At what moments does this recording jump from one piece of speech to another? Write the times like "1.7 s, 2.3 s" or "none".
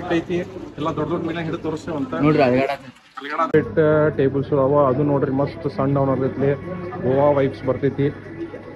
3.5 s